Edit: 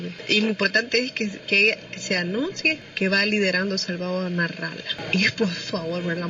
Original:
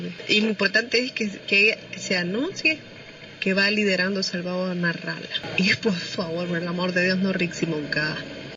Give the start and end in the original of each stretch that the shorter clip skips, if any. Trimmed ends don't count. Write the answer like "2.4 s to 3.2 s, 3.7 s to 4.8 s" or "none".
2.8 s to 3.3 s